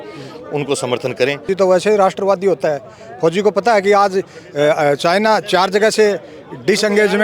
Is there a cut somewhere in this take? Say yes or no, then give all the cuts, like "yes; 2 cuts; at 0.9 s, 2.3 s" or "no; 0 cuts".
yes; 1 cut; at 1.5 s